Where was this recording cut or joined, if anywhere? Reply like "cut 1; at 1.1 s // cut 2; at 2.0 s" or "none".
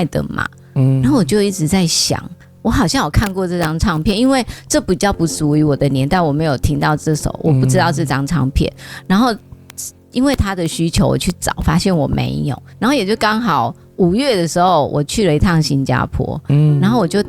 cut 1; at 12.6 s